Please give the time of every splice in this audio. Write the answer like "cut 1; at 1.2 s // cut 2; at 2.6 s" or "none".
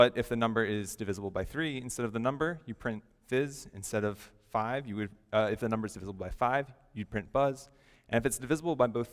cut 1; at 3.8 s

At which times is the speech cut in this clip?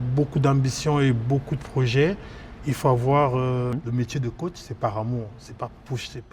cut 1; at 3.8 s

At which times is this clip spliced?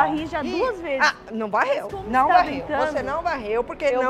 none

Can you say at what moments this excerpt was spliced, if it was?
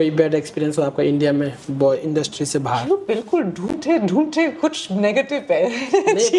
none

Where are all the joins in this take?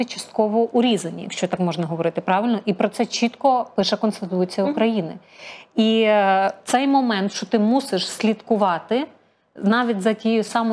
none

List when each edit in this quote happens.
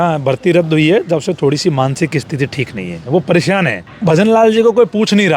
cut 1; at 3.9 s

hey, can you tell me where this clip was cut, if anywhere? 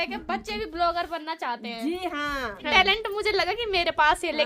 cut 1; at 2.7 s

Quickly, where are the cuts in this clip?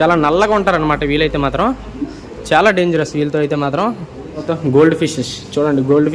cut 1; at 4.4 s

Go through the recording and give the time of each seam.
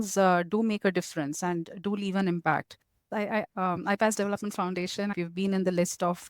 cut 1; at 3.2 s // cut 2; at 5.1 s

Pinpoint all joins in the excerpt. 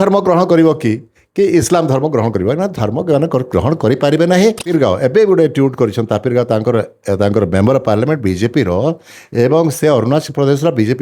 cut 1; at 4.6 s

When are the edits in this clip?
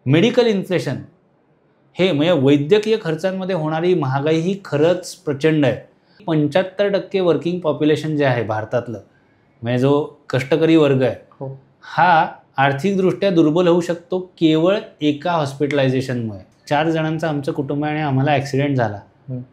cut 1; at 6.2 s // cut 2; at 16.5 s

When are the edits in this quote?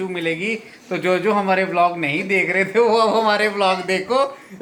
none

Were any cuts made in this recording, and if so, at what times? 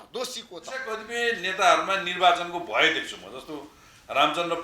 cut 1; at 1.0 s

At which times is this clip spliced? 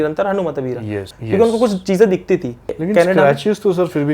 cut 1; at 1.1 s // cut 2; at 2.8 s

